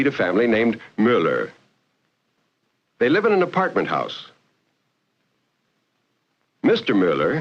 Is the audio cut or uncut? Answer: uncut